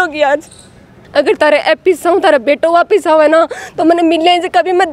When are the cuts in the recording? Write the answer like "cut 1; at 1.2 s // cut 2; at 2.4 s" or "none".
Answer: cut 1; at 1.0 s